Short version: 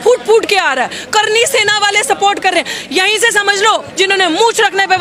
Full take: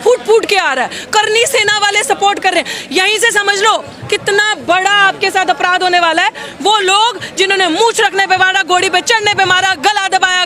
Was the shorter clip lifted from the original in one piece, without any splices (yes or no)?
no